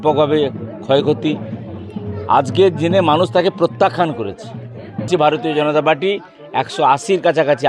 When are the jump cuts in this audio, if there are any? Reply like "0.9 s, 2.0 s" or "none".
5.1 s